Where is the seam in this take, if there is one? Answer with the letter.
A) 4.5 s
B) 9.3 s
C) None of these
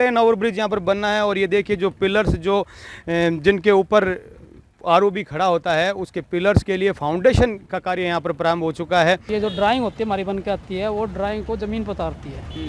B